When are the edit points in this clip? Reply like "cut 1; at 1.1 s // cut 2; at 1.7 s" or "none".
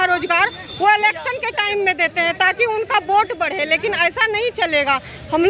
none

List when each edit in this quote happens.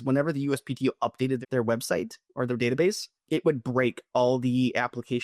cut 1; at 1.4 s // cut 2; at 3.1 s

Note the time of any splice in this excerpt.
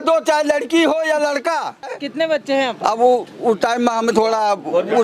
cut 1; at 1.9 s // cut 2; at 4.1 s

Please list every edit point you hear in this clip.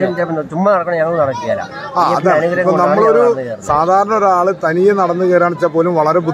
none

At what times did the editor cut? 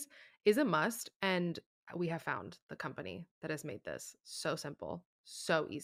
none

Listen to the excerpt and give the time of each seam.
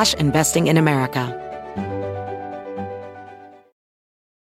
cut 1; at 1.3 s

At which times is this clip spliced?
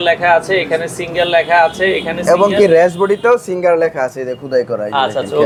none

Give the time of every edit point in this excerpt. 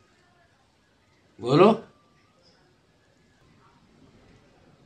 cut 1; at 3.5 s

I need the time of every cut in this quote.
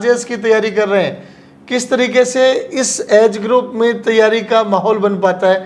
none

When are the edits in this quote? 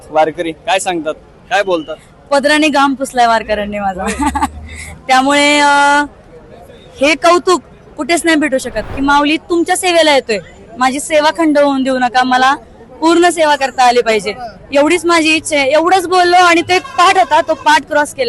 cut 1; at 8.9 s

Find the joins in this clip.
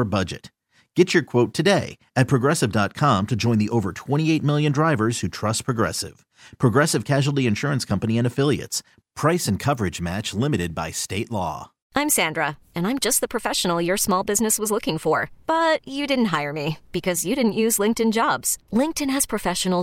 cut 1; at 11.8 s

